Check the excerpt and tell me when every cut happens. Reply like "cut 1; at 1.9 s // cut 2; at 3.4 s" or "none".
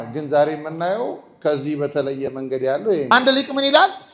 cut 1; at 3.1 s